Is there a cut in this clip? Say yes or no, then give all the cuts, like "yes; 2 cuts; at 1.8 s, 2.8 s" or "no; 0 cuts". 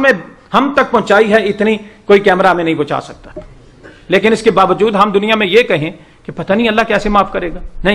no; 0 cuts